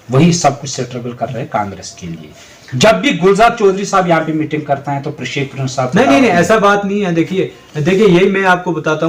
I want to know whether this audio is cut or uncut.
uncut